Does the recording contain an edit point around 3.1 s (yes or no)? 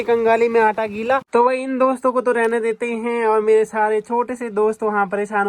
no